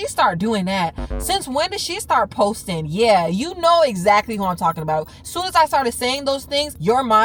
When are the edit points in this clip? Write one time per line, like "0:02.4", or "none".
none

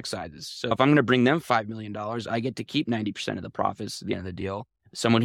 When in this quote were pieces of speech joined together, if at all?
none

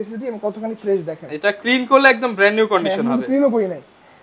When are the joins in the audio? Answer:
none

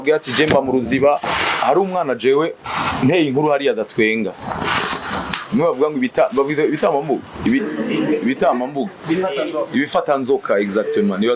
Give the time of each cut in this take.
0:01.3

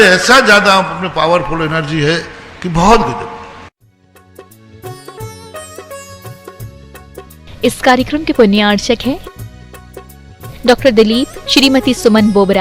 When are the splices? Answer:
0:04.0

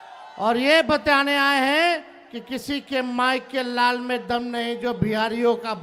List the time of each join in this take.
none

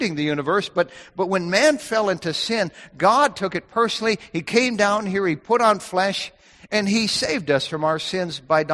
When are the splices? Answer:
none

